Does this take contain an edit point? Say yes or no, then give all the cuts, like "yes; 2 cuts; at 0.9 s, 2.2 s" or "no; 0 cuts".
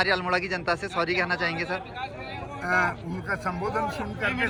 no; 0 cuts